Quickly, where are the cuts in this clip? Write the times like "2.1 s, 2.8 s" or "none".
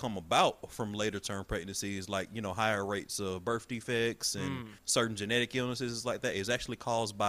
4.7 s